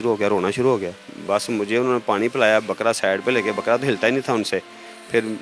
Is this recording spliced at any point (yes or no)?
no